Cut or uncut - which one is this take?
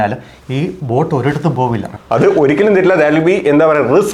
cut